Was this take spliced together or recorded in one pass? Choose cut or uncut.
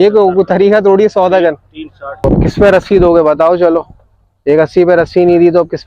cut